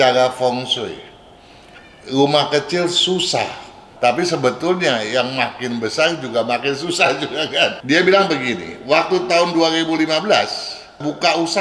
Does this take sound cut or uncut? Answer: cut